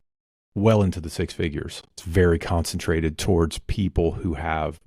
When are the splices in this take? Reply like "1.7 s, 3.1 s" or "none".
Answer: 2.0 s